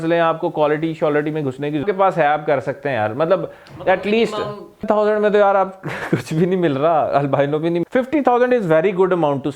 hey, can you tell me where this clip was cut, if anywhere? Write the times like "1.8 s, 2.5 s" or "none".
1.8 s, 4.8 s, 7.8 s